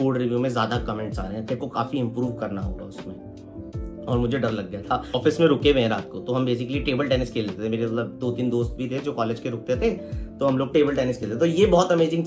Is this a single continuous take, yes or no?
no